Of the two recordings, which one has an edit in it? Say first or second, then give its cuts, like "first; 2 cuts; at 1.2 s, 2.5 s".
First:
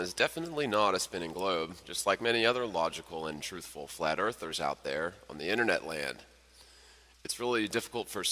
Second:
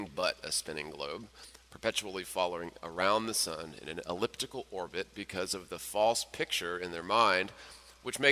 first; 1 cut; at 5.0 s